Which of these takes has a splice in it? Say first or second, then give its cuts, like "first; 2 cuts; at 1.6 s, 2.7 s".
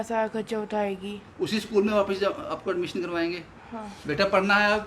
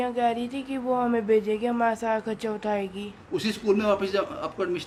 first; 1 cut; at 3.9 s